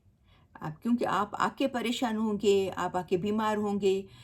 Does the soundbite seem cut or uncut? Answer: uncut